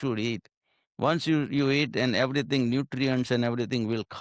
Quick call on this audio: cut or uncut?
uncut